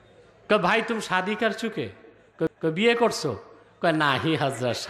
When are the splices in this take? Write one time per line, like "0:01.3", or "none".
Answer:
none